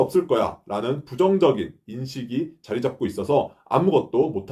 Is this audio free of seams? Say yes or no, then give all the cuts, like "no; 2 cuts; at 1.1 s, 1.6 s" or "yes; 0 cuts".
yes; 0 cuts